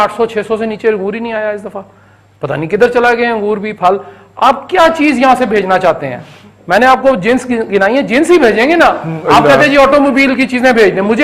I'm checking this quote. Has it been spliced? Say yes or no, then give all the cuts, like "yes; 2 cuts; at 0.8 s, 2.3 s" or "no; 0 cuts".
no; 0 cuts